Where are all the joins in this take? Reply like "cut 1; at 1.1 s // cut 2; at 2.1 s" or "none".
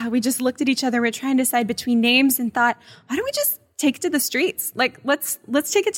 none